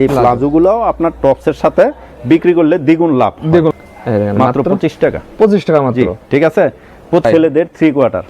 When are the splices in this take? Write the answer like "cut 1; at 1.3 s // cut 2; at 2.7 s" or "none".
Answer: cut 1; at 3.7 s // cut 2; at 7.2 s